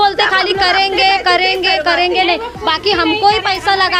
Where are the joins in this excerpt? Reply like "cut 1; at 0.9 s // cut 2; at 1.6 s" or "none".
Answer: none